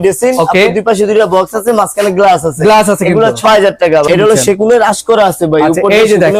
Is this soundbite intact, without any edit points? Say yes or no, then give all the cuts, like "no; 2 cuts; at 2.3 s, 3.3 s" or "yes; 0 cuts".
no; 1 cut; at 4.1 s